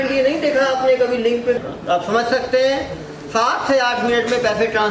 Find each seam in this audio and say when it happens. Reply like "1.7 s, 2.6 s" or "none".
1.6 s